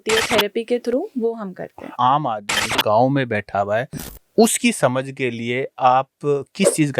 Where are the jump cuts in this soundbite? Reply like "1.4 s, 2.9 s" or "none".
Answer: 1.9 s

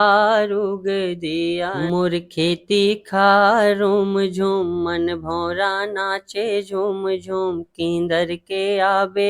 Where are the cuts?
1.7 s

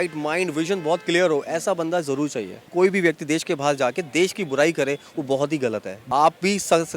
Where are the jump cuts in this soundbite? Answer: 2.6 s, 5.9 s

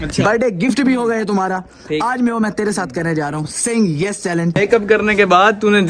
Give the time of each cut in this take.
4.6 s

